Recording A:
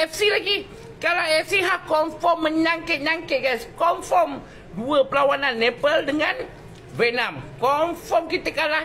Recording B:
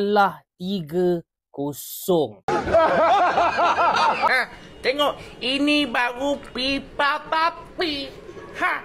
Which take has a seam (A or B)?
B